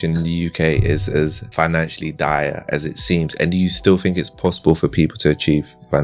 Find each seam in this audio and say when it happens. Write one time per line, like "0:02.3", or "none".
0:01.4
0:02.6